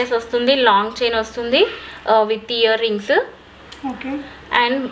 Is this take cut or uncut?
uncut